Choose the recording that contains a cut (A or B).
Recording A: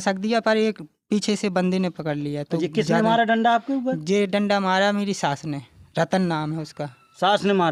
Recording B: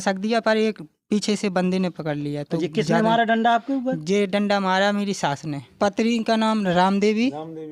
B